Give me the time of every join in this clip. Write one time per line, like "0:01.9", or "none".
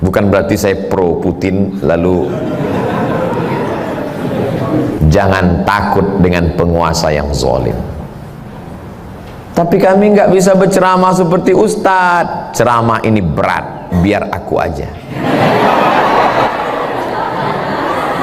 0:05.0